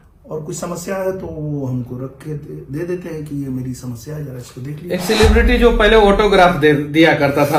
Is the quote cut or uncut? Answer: uncut